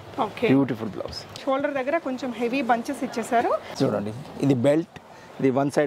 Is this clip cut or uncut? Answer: cut